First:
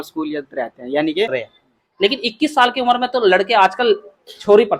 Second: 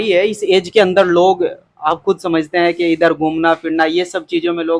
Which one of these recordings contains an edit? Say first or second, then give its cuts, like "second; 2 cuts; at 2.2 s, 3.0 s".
first; 1 cut; at 1.4 s